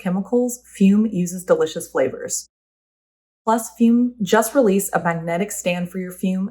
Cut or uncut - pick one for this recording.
cut